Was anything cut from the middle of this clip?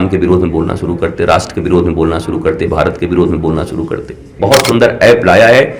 yes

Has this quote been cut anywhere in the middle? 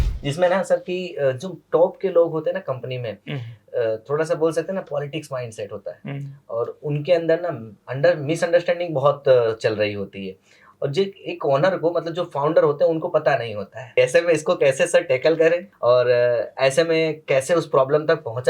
yes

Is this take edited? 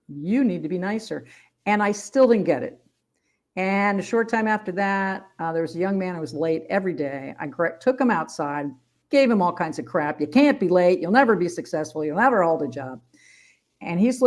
no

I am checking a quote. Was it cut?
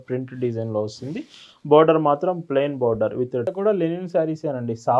yes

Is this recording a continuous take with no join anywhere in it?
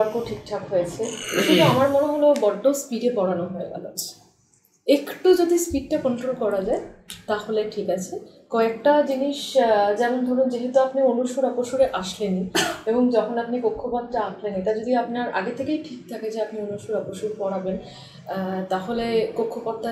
yes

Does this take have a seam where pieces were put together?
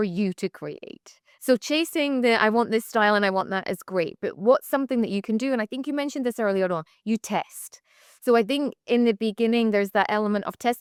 no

